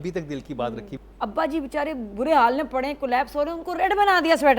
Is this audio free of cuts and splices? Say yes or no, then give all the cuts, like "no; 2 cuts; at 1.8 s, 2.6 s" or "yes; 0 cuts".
no; 1 cut; at 0.9 s